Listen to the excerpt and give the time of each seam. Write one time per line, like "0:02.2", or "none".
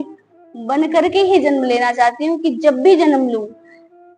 none